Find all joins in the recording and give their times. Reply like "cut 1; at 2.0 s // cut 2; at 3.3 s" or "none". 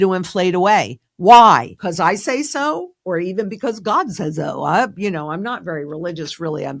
cut 1; at 1.7 s